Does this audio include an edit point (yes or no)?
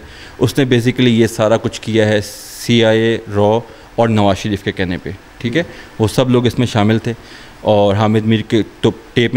no